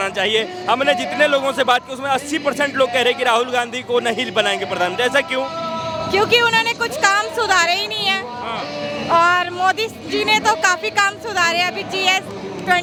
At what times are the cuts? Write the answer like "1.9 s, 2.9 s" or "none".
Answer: none